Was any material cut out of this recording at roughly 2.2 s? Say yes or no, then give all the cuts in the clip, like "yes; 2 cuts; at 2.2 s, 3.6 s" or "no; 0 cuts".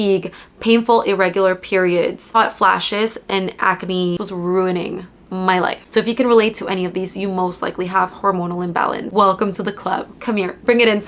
yes; 3 cuts; at 2.2 s, 4.2 s, 9.0 s